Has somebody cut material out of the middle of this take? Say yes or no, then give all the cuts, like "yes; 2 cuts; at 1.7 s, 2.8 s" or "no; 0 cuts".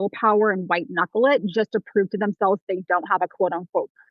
no; 0 cuts